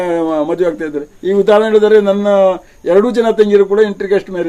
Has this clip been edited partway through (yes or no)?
no